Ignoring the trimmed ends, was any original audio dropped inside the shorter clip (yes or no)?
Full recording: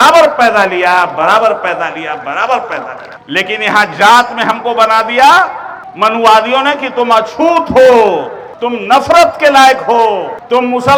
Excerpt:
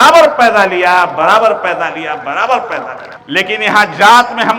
no